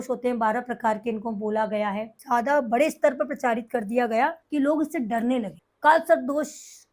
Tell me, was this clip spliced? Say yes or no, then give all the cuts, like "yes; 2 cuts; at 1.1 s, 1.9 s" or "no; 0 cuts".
yes; 3 cuts; at 2.1 s, 4.4 s, 5.6 s